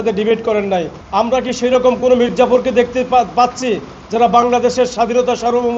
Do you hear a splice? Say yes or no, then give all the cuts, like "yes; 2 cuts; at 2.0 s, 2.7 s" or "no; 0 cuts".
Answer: yes; 1 cut; at 1.0 s